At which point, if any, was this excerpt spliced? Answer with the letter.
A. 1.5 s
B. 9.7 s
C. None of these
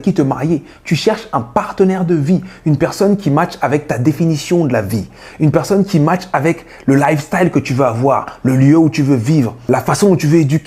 B